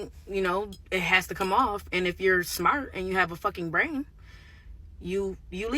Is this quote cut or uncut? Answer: cut